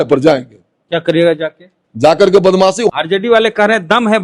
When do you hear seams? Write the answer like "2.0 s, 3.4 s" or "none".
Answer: 2.9 s